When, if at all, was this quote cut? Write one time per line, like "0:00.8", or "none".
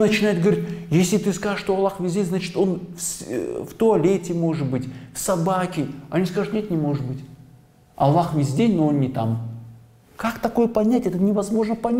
none